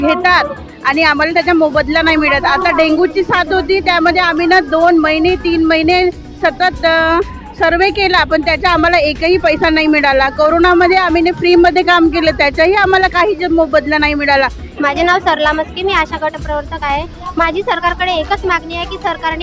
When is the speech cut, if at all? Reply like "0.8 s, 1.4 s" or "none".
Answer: 14.6 s